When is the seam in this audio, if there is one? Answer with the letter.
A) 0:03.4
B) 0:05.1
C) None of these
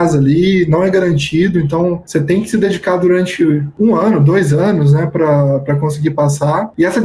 C